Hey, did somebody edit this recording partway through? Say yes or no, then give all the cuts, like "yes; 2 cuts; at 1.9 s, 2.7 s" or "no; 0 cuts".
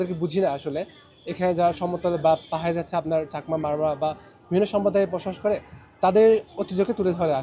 no; 0 cuts